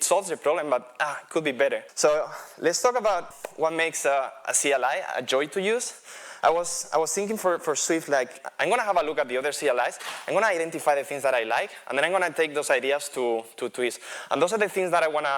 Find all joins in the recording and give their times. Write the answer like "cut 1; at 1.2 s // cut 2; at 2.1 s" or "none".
cut 1; at 1.9 s // cut 2; at 3.3 s // cut 3; at 8.4 s